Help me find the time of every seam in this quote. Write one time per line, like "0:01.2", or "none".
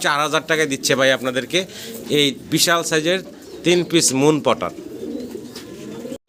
none

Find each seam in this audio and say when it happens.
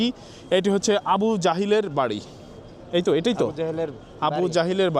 none

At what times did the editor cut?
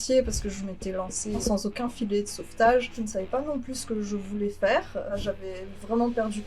0:01.4
0:03.0
0:05.2

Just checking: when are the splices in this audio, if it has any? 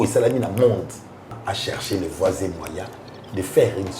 0:01.4

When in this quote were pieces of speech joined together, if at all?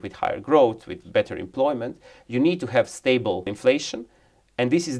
0:03.5

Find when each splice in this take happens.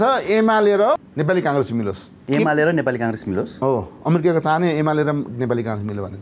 0:01.1
0:02.1

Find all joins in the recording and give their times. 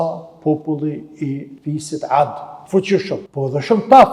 0:01.5
0:02.5
0:03.3

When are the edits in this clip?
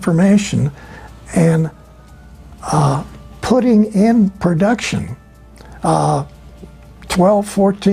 none

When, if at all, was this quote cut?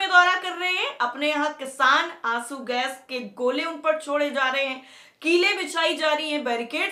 none

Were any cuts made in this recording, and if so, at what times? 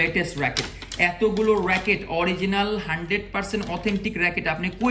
none

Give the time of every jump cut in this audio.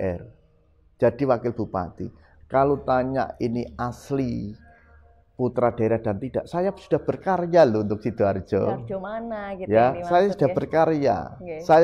none

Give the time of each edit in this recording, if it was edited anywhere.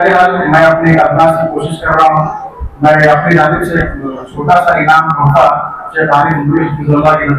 none

